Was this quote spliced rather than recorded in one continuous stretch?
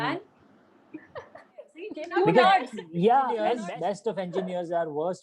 yes; 2 cuts; at 1.9 s, 3.5 s

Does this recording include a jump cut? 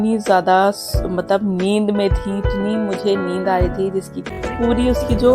yes; 1 cut; at 4.2 s

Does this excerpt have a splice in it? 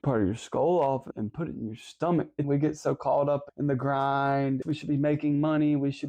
yes; 4 cuts; at 1.1 s, 2.4 s, 3.5 s, 4.6 s

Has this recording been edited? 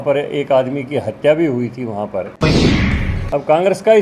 yes; 1 cut; at 2.8 s

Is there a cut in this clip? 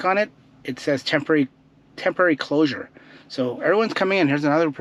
no; 0 cuts

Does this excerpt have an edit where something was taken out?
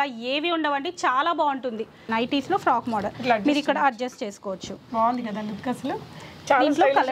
yes; 1 cut; at 2.0 s

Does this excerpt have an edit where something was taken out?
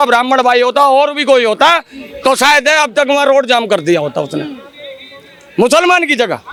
no; 0 cuts

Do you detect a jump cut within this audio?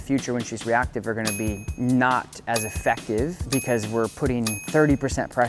yes; 3 cuts; at 1.7 s, 3.5 s, 4.6 s

